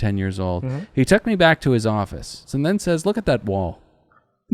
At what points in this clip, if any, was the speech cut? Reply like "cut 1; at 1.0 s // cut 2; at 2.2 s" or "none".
cut 1; at 2.4 s